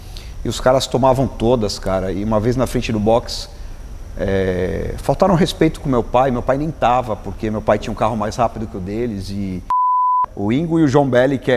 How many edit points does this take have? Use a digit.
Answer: 1